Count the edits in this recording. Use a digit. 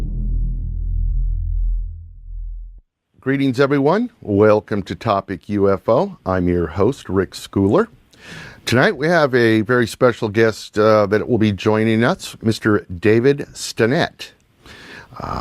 1